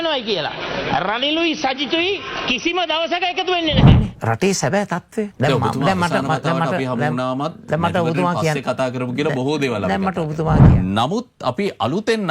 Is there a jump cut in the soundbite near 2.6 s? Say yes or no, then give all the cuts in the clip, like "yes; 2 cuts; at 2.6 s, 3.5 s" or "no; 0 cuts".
no; 2 cuts; at 3.9 s, 10.7 s